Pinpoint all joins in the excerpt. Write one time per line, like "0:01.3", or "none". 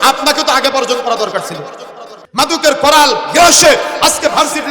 0:02.2